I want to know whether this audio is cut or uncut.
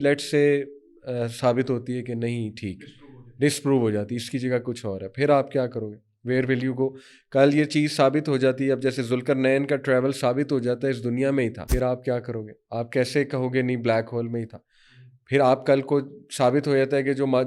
cut